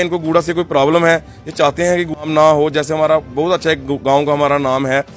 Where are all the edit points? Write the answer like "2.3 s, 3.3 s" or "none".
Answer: 2.2 s